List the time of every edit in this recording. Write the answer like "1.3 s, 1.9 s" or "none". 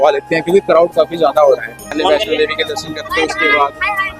1.9 s